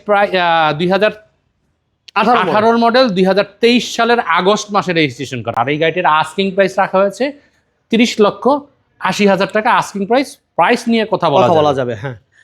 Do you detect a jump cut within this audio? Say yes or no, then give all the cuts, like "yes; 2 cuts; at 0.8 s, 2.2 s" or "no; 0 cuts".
no; 0 cuts